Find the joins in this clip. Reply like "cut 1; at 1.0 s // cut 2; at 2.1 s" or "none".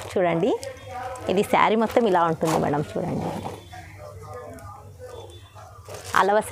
none